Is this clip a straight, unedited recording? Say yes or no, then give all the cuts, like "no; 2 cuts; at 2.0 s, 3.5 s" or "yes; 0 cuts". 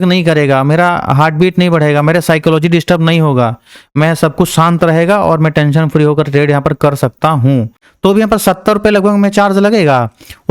no; 1 cut; at 7.8 s